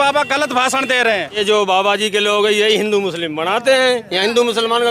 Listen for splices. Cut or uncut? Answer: cut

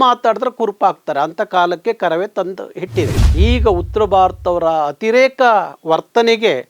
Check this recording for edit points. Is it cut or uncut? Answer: cut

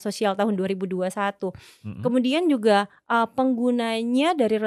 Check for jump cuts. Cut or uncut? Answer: uncut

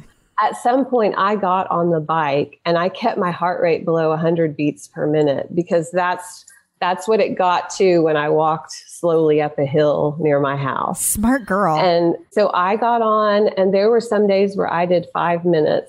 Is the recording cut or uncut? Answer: cut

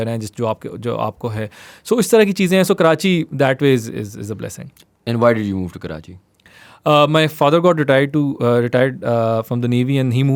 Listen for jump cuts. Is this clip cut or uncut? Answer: uncut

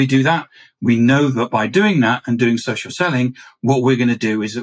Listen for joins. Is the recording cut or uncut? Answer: uncut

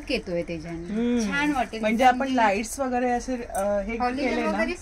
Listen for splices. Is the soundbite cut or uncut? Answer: uncut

